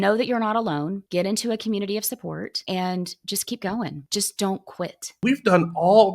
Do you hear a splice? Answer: yes; 4 cuts; at 1.0 s, 2.6 s, 4.0 s, 5.1 s

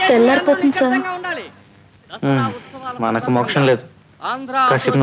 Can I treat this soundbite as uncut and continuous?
yes; 0 cuts

